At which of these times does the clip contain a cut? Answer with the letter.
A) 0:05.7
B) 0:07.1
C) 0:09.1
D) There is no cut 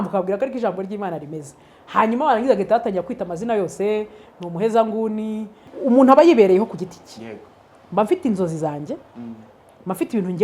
A